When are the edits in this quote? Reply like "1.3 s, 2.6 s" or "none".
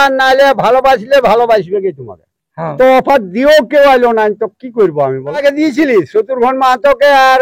2.8 s, 5.4 s